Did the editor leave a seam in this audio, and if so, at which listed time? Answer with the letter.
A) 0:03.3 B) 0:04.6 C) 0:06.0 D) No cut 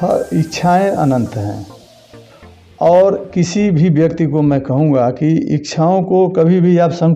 D